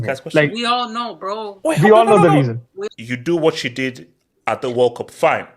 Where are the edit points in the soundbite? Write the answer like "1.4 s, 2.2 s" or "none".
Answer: 2.7 s